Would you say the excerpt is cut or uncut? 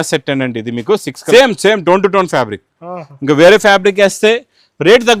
cut